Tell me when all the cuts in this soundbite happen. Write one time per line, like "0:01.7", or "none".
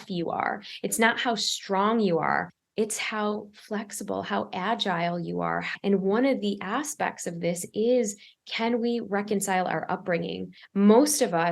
0:02.6
0:05.7
0:10.6